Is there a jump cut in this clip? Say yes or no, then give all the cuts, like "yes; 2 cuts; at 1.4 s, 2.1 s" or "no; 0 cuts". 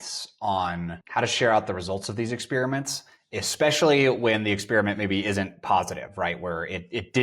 yes; 1 cut; at 0.9 s